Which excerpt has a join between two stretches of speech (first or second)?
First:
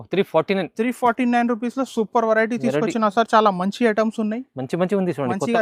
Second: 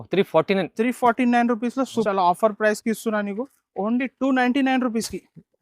second